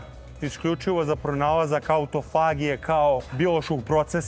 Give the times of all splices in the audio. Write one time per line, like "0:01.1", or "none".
0:03.3